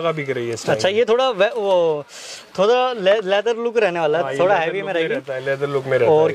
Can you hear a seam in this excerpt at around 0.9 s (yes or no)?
no